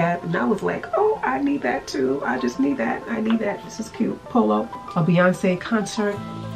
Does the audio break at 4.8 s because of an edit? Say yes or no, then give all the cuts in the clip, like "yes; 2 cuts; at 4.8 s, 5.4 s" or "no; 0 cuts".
yes; 1 cut; at 4.8 s